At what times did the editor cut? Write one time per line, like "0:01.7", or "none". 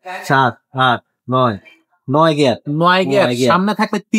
none